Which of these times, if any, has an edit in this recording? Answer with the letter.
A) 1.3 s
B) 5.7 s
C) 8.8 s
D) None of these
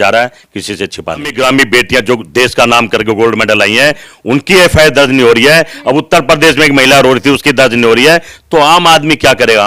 A